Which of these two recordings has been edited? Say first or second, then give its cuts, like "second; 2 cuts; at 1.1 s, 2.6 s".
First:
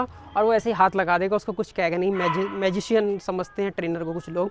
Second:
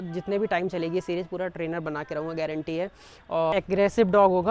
second; 1 cut; at 3.5 s